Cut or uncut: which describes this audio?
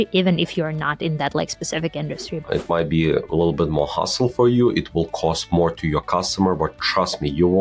cut